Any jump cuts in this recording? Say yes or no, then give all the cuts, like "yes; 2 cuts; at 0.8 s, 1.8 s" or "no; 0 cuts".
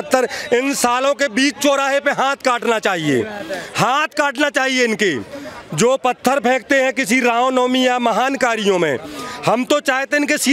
no; 0 cuts